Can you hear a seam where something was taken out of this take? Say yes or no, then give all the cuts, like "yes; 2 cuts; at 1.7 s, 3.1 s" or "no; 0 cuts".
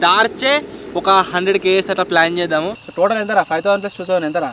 yes; 1 cut; at 2.8 s